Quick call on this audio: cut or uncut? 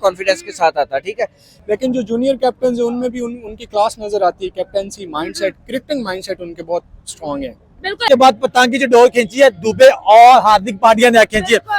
cut